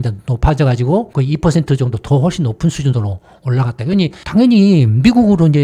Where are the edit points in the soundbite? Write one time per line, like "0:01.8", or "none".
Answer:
none